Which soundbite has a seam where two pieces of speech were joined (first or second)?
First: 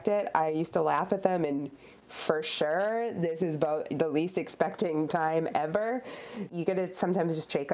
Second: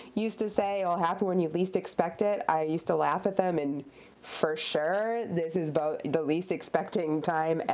first